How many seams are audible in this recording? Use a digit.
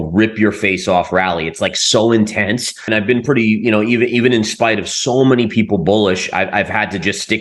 1